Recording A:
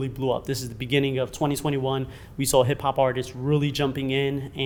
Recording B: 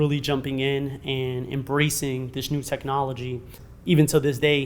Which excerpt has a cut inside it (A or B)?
B